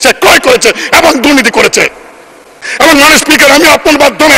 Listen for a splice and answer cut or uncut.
cut